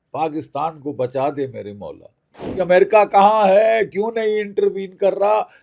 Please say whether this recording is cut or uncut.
cut